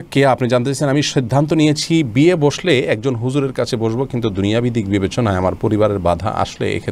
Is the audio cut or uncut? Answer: uncut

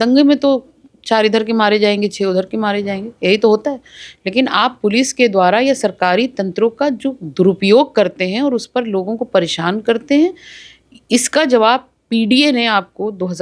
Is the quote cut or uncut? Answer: uncut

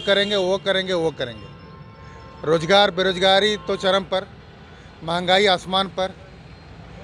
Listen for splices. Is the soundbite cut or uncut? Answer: uncut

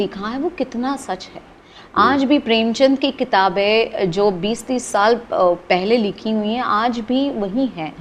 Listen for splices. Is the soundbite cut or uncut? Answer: uncut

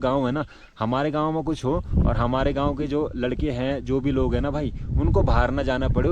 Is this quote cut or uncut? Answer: uncut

